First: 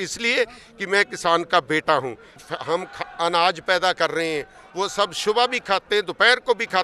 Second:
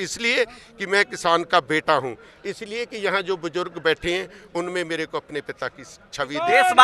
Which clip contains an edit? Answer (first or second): first